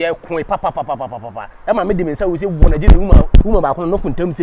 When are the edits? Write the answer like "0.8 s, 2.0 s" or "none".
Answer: none